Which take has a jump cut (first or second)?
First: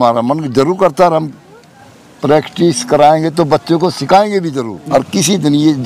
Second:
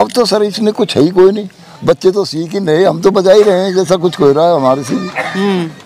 first